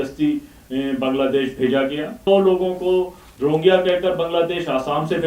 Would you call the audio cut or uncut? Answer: cut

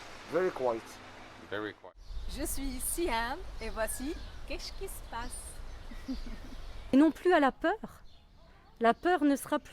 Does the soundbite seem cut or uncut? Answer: cut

